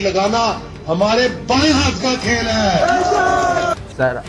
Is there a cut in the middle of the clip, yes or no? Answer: no